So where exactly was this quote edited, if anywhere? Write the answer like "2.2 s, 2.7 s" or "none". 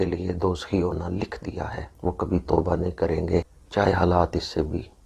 1.8 s, 3.6 s

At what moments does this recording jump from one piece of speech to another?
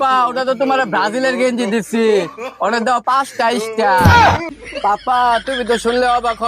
4.6 s

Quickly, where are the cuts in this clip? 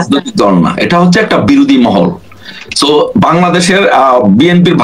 none

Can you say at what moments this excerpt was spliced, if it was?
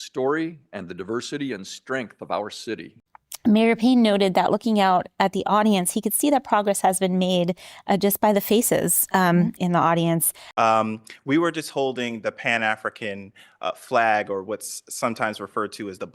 3.0 s, 10.4 s

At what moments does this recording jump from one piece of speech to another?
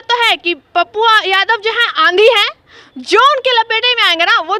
none

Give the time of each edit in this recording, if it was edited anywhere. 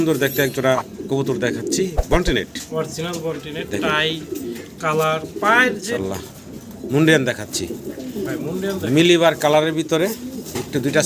5.9 s

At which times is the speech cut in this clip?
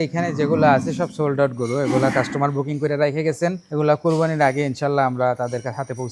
3.6 s

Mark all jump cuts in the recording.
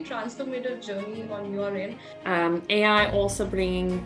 2.1 s

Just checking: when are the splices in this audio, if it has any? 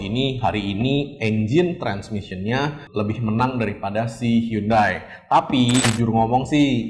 5.9 s

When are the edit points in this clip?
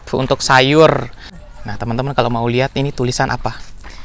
1.9 s

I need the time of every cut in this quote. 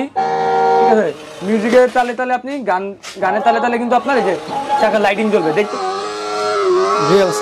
5.6 s

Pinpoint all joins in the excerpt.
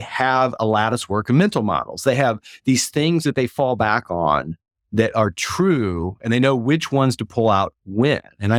none

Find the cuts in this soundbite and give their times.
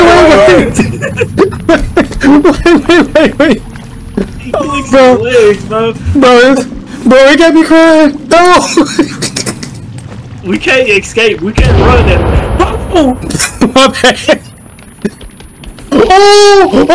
none

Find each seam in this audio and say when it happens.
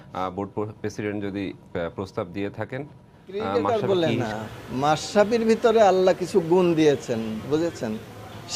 3.6 s

